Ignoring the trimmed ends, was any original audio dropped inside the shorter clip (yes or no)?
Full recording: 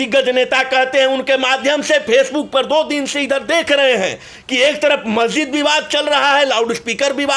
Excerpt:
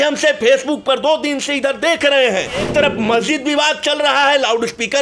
yes